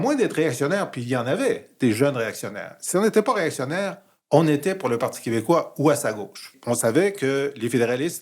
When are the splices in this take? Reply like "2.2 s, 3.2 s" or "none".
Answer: 6.5 s